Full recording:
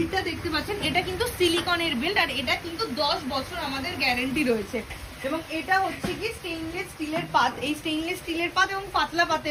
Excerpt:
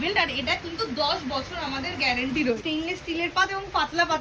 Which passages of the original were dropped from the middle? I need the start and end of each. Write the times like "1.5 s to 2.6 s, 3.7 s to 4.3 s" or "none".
4.6 s to 7.8 s